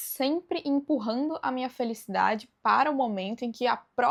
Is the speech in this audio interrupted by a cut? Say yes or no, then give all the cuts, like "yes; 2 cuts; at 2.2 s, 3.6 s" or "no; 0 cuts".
no; 0 cuts